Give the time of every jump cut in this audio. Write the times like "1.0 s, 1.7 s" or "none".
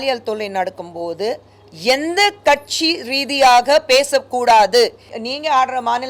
5.2 s